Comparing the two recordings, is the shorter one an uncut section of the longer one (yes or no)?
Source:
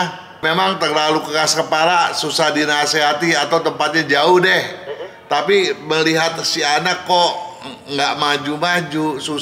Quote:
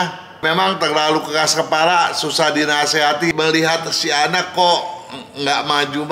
no